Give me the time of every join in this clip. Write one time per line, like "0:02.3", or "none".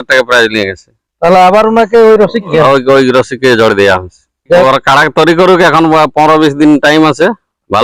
0:02.5
0:04.6